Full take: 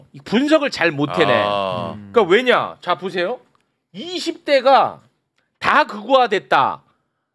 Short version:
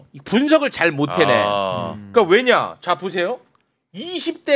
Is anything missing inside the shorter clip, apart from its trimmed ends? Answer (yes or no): no